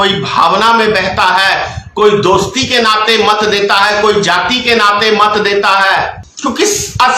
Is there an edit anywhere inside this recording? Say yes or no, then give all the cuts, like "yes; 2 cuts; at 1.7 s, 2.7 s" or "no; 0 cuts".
yes; 1 cut; at 6.2 s